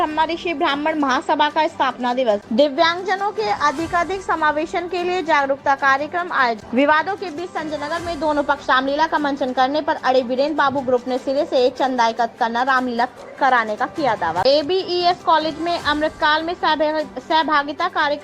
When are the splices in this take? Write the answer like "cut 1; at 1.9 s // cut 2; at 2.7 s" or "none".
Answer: cut 1; at 2.4 s // cut 2; at 6.6 s // cut 3; at 14.4 s